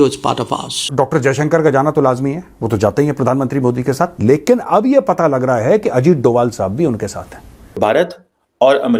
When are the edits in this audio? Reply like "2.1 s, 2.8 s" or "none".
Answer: 0.9 s, 7.6 s